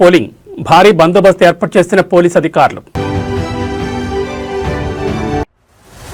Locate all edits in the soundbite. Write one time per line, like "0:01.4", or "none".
none